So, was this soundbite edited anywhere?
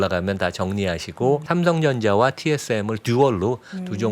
yes; 1 cut; at 1.4 s

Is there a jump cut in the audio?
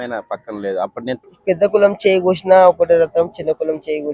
yes; 1 cut; at 1.1 s

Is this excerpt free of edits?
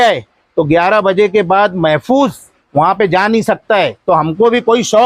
no; 1 cut; at 4.0 s

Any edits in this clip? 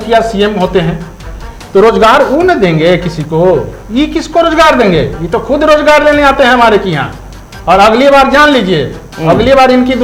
no; 0 cuts

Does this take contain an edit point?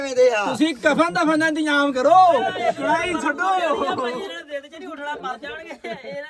no; 0 cuts

